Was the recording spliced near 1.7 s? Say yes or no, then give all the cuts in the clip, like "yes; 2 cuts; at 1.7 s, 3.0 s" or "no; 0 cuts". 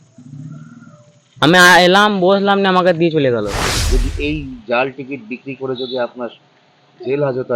no; 1 cut; at 3.7 s